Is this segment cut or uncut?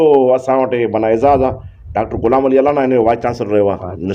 uncut